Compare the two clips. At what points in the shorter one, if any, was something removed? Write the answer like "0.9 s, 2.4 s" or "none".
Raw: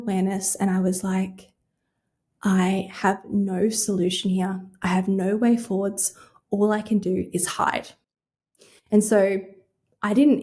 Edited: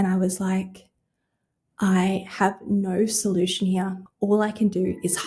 4.0 s